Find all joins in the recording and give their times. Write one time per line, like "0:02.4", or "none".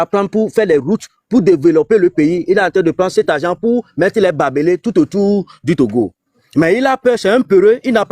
none